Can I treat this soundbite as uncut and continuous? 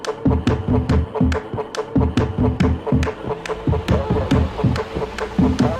no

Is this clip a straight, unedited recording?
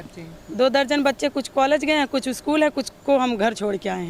yes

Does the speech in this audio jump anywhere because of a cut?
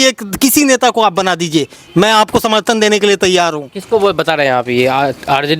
no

